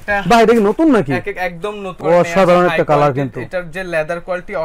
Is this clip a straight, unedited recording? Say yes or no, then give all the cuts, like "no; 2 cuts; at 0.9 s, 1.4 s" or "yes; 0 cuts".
yes; 0 cuts